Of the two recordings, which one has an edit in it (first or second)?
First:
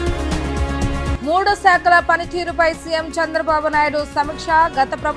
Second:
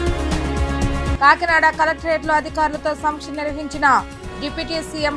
first